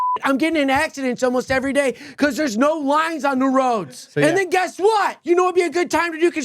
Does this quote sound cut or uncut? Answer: cut